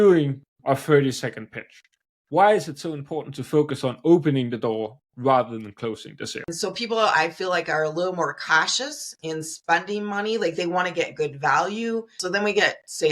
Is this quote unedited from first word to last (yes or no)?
no